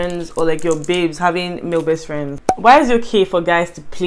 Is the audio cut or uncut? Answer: cut